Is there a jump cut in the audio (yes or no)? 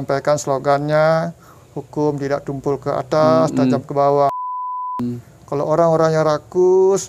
yes